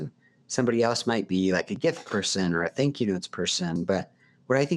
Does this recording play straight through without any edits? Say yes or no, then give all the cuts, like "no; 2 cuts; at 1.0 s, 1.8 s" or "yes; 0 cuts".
no; 1 cut; at 3.7 s